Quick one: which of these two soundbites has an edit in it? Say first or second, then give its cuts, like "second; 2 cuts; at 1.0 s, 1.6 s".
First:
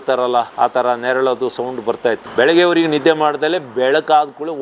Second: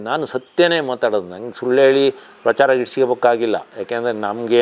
first; 1 cut; at 2.2 s